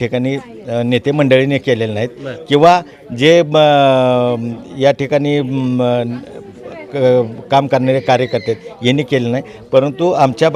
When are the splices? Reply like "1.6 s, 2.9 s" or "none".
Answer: none